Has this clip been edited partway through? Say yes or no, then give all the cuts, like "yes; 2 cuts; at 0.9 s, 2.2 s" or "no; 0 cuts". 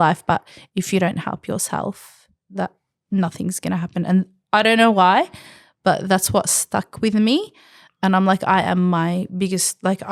no; 0 cuts